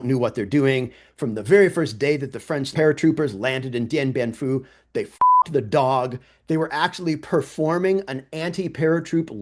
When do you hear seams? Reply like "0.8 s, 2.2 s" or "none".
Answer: 2.7 s